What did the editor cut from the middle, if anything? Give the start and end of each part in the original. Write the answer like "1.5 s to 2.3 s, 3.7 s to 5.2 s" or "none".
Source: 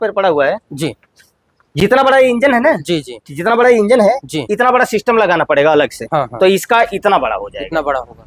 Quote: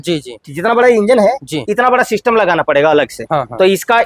none